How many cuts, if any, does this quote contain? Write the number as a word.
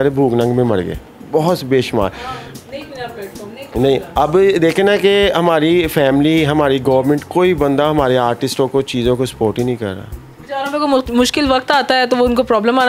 zero